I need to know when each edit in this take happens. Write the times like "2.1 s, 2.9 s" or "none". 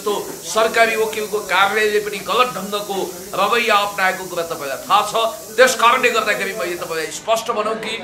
none